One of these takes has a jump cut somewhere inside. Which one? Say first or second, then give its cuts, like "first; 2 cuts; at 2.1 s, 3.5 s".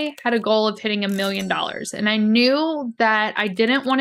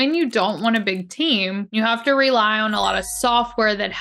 second; 1 cut; at 1.6 s